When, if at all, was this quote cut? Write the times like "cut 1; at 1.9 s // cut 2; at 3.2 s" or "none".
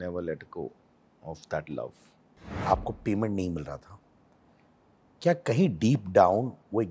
cut 1; at 2.6 s